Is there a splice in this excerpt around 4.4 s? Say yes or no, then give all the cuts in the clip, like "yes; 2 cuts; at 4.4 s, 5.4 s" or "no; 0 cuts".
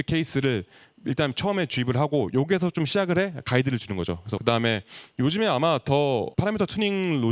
yes; 2 cuts; at 4.4 s, 6.3 s